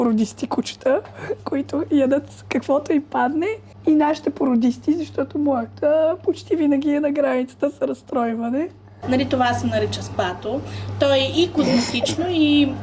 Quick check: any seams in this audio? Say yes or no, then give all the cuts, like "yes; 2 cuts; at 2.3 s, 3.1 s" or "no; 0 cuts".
yes; 2 cuts; at 3.7 s, 8.9 s